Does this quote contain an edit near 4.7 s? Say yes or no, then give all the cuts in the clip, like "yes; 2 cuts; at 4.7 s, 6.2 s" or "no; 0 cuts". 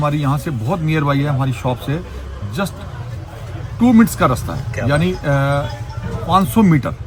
no; 0 cuts